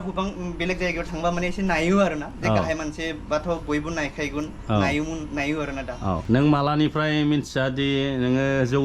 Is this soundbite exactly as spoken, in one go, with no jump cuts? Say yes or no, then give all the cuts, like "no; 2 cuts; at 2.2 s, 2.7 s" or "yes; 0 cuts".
no; 1 cut; at 6.2 s